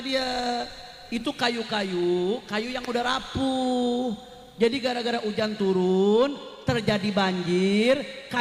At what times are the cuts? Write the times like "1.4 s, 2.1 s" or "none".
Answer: none